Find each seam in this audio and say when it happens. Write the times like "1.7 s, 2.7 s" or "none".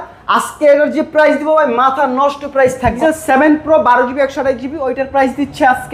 3.0 s